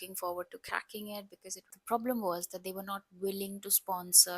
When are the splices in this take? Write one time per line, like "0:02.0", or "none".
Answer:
0:01.7